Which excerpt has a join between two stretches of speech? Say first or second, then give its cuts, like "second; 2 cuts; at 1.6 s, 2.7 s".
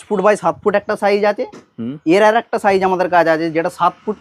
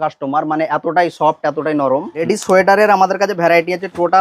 second; 1 cut; at 2.2 s